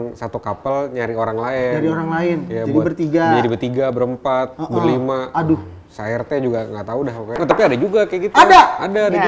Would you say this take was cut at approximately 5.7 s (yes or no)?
no